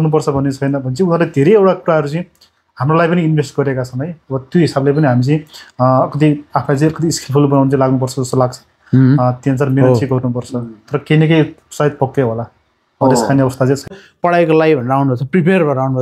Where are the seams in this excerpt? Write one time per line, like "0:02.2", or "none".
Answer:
0:13.9